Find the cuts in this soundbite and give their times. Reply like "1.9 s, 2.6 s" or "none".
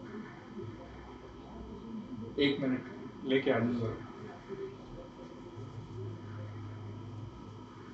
none